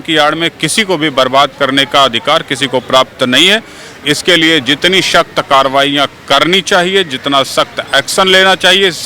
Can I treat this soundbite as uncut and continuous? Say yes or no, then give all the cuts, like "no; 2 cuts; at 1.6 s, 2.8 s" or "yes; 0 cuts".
yes; 0 cuts